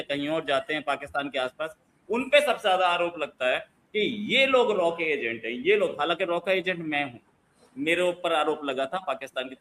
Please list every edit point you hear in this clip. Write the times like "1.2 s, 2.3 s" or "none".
none